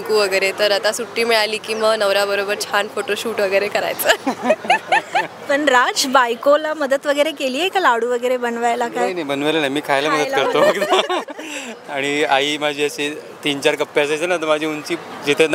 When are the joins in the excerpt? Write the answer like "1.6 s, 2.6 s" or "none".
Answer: none